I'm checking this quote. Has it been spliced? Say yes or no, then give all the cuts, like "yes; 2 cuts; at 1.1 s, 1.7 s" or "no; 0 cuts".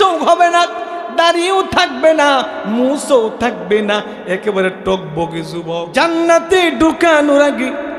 yes; 1 cut; at 5.8 s